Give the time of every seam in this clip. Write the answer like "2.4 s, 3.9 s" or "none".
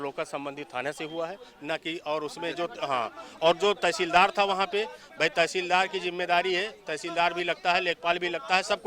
none